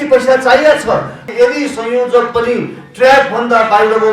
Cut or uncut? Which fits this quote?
cut